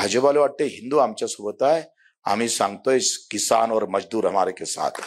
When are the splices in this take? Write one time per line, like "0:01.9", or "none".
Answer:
none